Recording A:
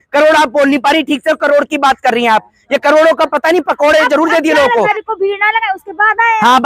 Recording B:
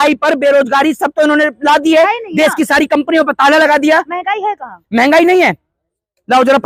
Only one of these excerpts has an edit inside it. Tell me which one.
A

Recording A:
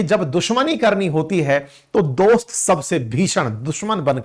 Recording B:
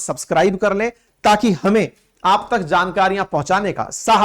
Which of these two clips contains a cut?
B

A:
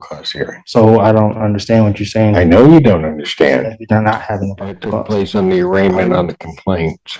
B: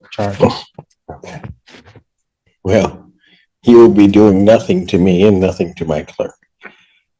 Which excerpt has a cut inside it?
A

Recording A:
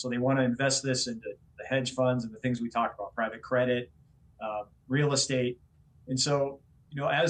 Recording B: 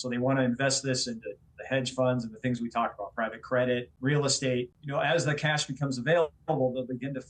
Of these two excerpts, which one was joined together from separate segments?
B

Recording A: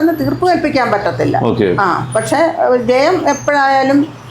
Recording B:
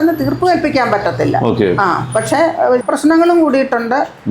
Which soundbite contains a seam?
B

